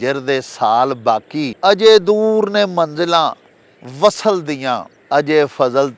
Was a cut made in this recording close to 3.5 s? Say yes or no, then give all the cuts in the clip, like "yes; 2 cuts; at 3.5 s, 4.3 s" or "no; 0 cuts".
no; 2 cuts; at 1.5 s, 4.9 s